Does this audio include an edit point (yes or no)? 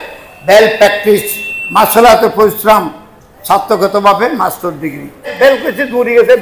yes